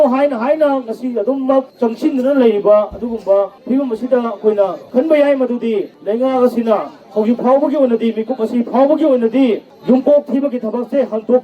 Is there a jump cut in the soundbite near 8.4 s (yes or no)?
no